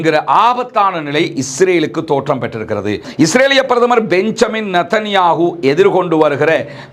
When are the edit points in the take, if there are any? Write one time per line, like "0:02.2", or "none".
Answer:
0:03.0